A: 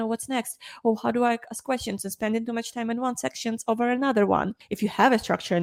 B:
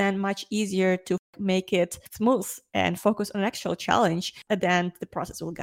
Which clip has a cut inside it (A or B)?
B